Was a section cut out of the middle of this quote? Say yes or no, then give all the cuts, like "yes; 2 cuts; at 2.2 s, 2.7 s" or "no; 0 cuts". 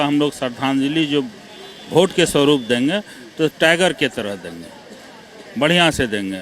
no; 0 cuts